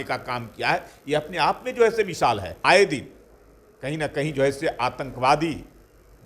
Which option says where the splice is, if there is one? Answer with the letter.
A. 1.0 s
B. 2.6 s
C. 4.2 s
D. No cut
B